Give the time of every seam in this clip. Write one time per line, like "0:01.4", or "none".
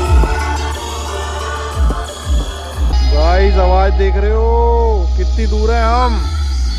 0:02.9